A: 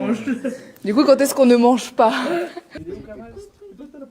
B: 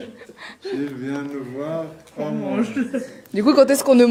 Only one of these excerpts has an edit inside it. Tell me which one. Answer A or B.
A